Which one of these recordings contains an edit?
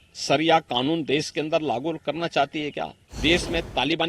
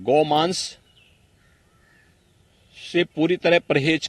first; 1 cut; at 3.0 s

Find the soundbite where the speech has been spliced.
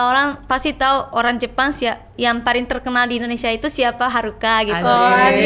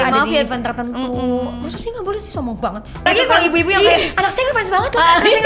second; 1 cut; at 3.1 s

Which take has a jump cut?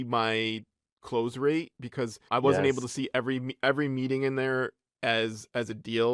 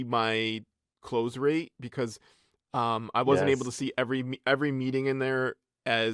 first; 1 cut; at 2.2 s

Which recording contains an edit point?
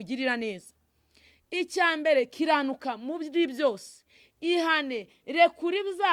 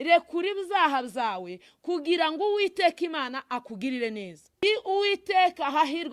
second; 1 cut; at 4.6 s

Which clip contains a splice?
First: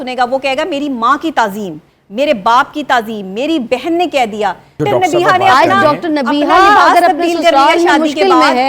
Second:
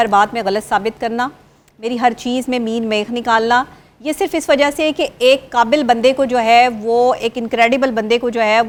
first; 1 cut; at 4.8 s

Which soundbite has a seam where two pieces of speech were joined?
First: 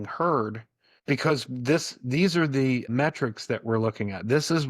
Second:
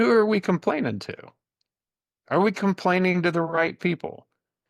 first; 1 cut; at 2.9 s

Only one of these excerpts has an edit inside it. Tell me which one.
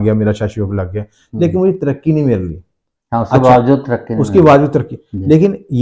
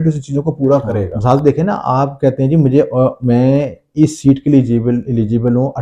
second; 1 cut; at 1.1 s

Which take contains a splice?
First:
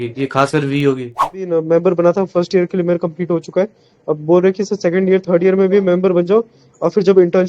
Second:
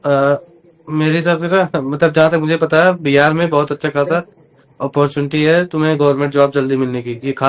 first; 1 cut; at 1.6 s

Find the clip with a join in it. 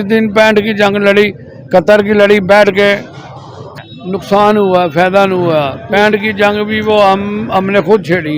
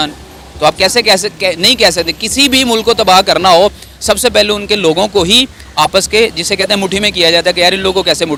first; 1 cut; at 3.7 s

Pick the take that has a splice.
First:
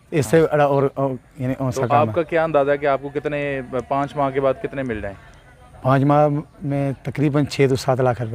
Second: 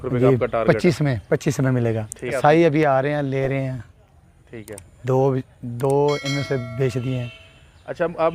second; 1 cut; at 2.3 s

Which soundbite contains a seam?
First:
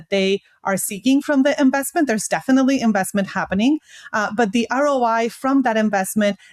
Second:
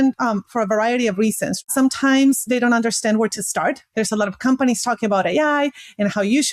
second; 2 cuts; at 1.6 s, 3.8 s

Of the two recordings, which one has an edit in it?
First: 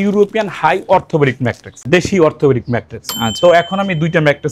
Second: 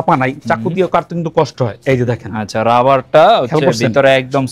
first; 1 cut; at 1.9 s

